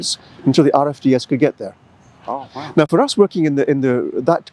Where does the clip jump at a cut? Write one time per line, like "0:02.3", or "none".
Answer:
none